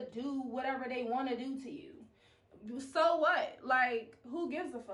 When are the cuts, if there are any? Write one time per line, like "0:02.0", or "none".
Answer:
none